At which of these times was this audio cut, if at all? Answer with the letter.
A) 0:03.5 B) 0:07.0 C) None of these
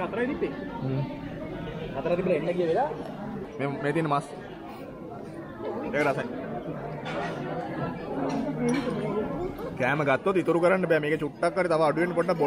A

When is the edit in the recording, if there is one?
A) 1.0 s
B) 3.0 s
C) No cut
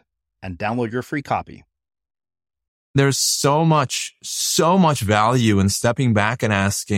B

